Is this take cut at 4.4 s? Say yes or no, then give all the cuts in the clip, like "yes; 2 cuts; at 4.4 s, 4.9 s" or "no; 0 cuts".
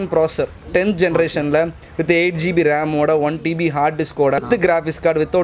yes; 1 cut; at 4.4 s